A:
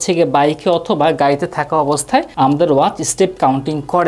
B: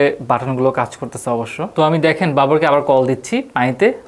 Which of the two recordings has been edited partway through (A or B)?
B